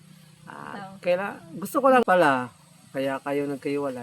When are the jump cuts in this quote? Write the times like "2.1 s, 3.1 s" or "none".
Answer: 2.0 s